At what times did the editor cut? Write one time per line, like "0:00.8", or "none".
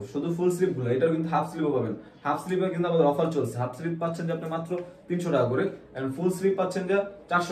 none